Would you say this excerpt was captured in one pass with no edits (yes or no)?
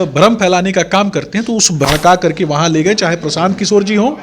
no